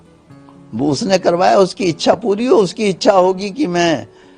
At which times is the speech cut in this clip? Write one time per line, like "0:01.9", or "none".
none